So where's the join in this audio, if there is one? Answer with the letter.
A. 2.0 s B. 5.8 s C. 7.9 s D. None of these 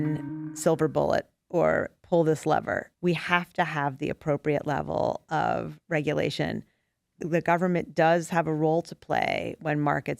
D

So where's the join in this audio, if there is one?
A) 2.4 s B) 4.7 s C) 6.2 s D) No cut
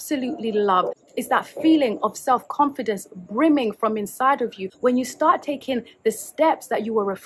B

